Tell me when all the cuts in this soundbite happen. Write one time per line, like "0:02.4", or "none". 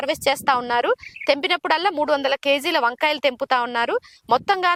none